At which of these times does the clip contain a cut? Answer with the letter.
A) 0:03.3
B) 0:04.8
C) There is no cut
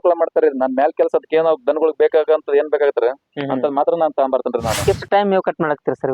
B